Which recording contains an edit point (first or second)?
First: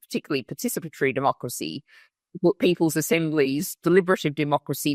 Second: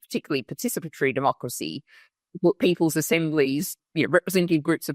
second